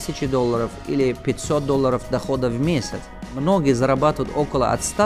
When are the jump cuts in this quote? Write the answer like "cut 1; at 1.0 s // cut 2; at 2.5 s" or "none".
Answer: cut 1; at 3.4 s